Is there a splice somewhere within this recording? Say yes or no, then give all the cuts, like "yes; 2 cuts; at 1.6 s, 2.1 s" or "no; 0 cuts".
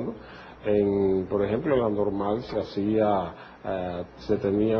yes; 1 cut; at 2.9 s